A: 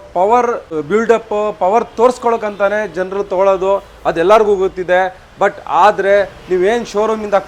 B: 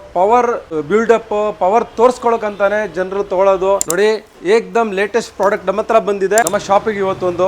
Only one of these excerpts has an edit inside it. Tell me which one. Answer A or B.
B